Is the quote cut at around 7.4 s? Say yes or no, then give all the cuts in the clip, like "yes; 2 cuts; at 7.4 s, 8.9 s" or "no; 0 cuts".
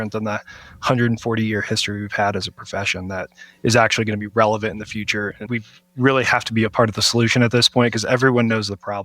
no; 1 cut; at 5.4 s